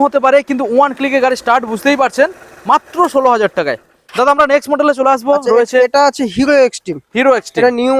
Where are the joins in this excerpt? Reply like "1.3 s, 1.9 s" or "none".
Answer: none